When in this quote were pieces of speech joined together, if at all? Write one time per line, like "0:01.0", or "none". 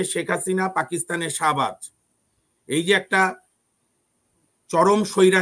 none